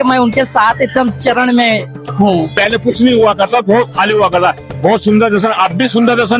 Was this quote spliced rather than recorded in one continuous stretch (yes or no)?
yes